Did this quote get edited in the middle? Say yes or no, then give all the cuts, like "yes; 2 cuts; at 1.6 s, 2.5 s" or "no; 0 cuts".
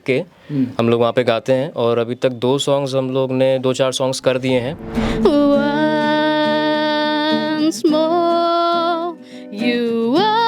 yes; 1 cut; at 5.0 s